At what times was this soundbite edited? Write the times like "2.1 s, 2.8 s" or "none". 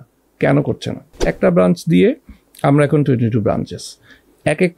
1.3 s